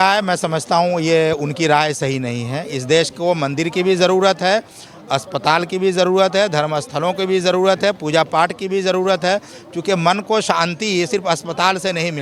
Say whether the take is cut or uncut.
uncut